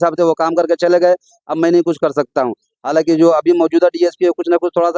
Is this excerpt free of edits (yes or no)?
yes